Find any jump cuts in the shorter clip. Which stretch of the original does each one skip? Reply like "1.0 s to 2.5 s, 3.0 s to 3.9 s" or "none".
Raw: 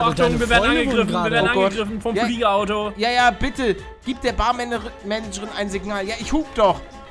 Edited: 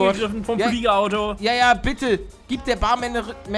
none